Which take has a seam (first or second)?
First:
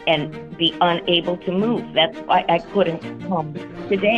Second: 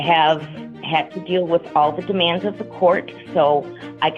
first